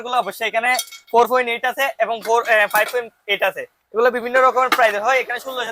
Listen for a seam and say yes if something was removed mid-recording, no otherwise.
no